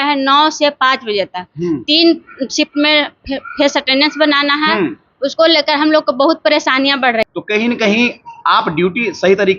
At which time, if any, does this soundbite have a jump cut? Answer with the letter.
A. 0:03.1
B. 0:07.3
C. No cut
B